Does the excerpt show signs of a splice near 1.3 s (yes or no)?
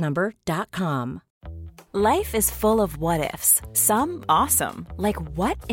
yes